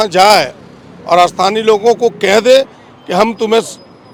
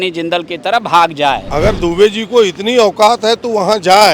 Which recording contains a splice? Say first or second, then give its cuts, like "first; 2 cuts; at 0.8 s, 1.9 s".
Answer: second; 1 cut; at 1.4 s